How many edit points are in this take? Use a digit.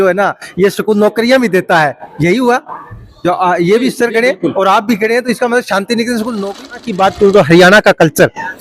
1